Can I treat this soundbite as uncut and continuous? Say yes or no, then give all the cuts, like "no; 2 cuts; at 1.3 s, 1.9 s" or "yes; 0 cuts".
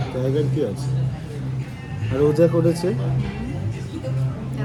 yes; 0 cuts